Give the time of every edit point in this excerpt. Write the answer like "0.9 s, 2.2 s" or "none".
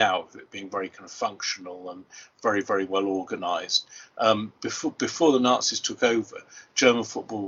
none